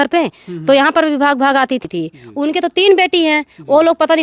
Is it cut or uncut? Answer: cut